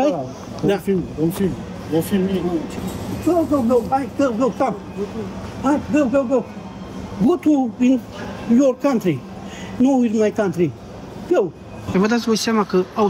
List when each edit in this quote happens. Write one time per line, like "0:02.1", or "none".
0:02.7
0:11.7